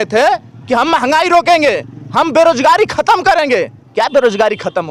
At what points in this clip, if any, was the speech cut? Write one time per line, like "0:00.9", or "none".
none